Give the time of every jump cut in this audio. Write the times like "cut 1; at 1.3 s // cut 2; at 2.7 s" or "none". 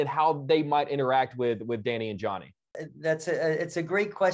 cut 1; at 2.8 s